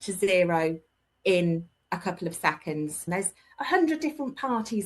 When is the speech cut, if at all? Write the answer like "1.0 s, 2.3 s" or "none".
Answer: 3.1 s